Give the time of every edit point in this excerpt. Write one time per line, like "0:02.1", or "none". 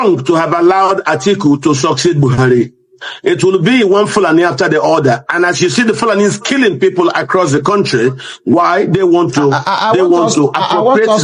none